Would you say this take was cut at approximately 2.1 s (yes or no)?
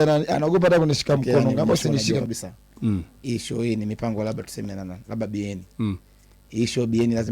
yes